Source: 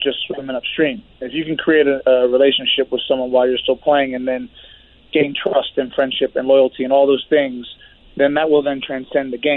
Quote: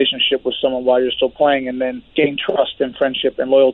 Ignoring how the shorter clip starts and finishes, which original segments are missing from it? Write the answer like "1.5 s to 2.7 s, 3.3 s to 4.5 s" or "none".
4.5 s to 5.0 s